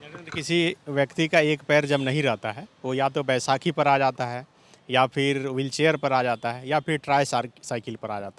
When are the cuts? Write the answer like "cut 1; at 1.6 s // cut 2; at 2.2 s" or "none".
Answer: none